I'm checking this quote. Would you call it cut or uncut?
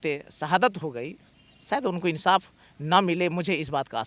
uncut